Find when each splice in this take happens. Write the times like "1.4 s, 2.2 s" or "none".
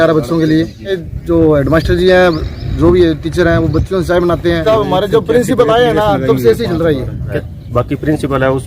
1.0 s, 4.6 s, 7.3 s